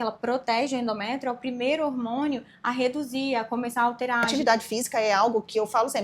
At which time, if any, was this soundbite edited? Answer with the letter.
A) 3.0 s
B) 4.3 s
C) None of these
B